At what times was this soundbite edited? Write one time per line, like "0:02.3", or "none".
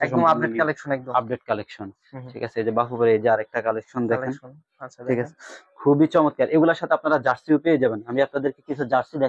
none